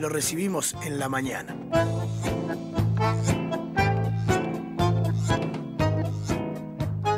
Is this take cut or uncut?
uncut